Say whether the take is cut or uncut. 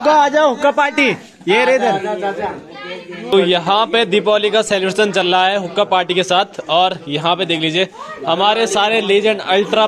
cut